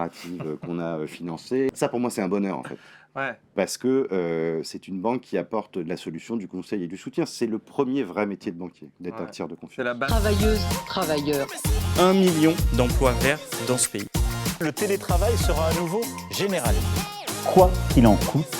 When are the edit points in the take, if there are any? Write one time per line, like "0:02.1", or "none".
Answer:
0:01.7
0:10.1

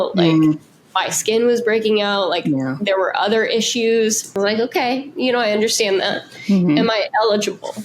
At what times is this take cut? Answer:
0:04.2

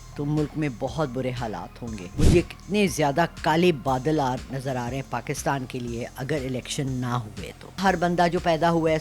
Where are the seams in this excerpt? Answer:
0:02.0
0:07.8

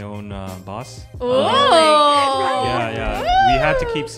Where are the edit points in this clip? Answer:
0:01.0

